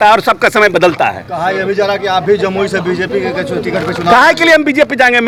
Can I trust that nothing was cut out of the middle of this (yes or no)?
yes